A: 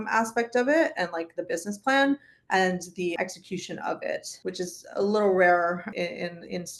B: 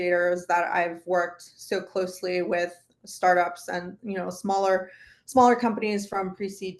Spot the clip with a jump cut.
A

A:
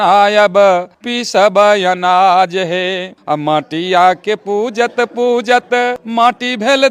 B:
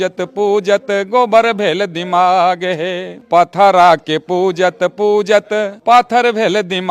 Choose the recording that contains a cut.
A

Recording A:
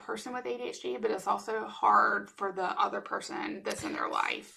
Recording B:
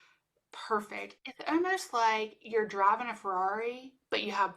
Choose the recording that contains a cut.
B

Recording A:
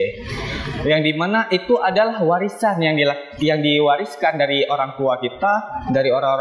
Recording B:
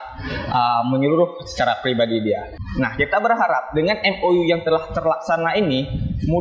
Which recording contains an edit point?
B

